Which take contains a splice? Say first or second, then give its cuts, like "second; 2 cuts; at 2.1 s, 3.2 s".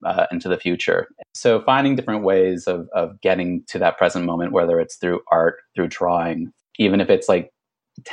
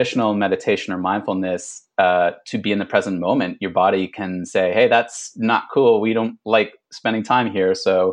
first; 2 cuts; at 1.2 s, 6.5 s